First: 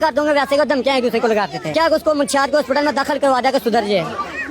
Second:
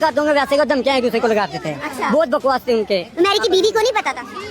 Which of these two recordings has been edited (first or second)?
first